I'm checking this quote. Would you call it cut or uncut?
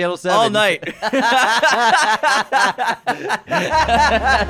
uncut